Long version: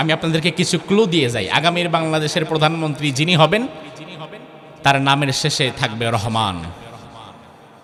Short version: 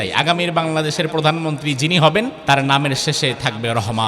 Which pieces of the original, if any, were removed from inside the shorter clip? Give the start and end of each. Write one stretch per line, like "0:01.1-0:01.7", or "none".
0:03.7-0:04.7

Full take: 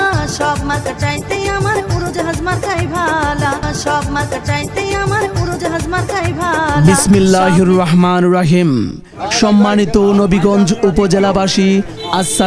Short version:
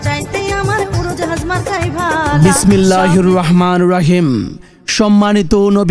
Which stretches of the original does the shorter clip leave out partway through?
0:03.3-0:06.7

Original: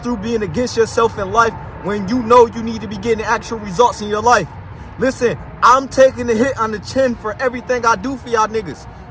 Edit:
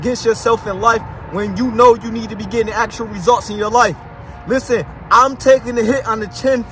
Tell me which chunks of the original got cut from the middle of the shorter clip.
none

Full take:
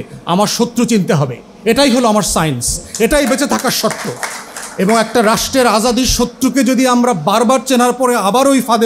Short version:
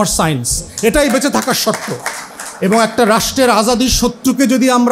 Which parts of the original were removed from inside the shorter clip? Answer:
none

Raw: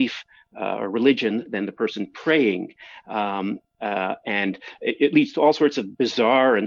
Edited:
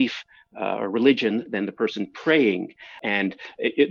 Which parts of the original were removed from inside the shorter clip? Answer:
0:03.0-0:04.2

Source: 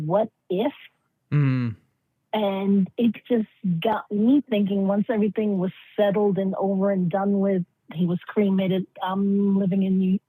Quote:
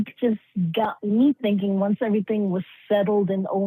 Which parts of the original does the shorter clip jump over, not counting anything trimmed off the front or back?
none

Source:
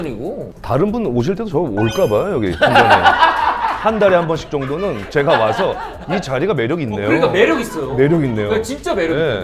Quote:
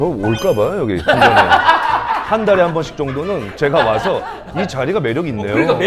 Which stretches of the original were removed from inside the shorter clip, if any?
none

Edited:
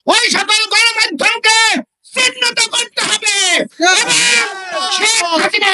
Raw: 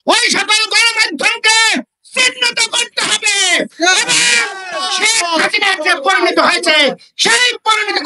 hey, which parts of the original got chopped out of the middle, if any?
none

